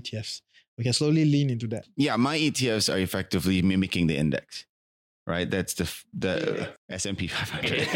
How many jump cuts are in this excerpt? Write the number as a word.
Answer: one